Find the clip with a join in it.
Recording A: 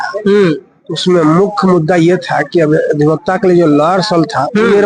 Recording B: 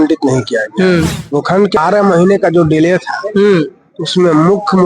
B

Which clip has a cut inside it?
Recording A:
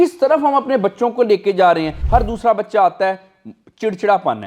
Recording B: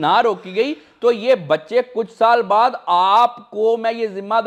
A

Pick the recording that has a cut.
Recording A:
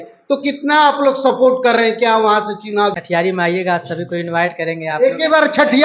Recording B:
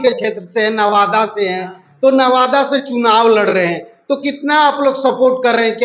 A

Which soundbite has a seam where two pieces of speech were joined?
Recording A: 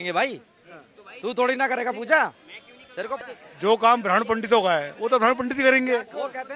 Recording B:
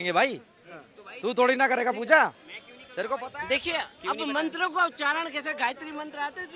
A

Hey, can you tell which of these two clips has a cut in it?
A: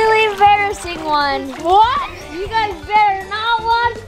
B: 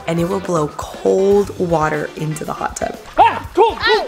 B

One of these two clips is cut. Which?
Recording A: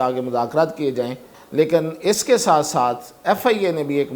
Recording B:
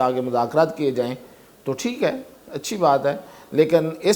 A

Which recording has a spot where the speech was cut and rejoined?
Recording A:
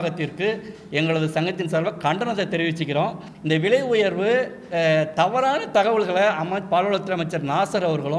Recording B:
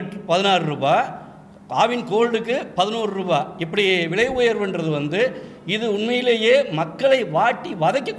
A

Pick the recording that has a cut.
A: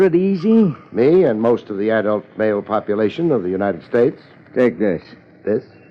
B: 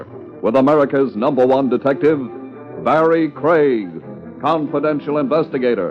A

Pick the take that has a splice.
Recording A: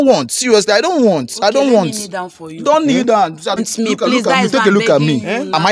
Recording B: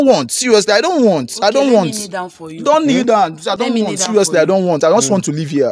A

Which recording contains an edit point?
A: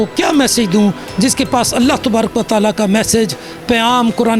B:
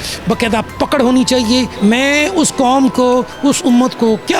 B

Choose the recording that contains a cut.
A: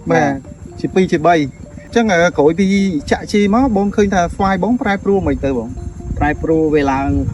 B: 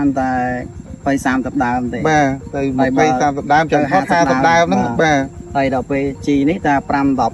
A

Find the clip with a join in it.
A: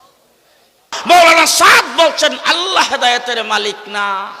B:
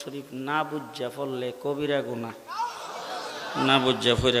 A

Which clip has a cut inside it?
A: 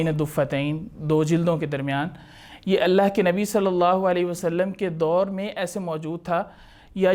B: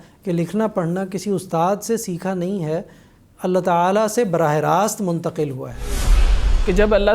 B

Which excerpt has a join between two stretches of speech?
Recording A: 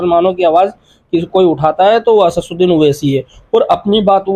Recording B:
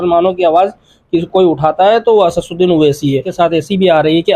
B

